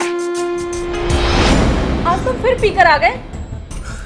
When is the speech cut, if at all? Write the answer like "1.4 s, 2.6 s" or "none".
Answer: 1.5 s